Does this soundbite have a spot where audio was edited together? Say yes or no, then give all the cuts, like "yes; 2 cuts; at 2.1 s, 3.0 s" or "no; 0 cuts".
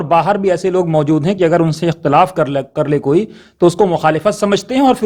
no; 0 cuts